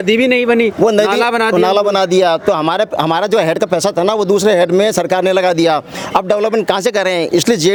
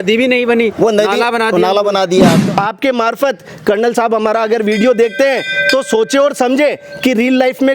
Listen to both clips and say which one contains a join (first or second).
second